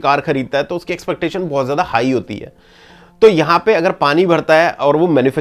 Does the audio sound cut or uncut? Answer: uncut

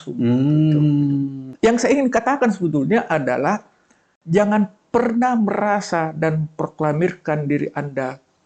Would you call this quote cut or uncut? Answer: cut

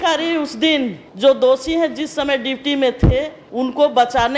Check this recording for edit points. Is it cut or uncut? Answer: cut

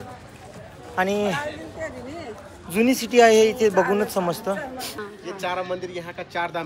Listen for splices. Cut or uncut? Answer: cut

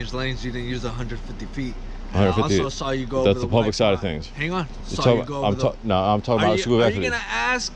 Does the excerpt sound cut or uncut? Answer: cut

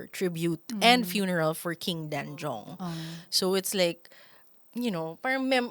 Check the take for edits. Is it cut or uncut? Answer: uncut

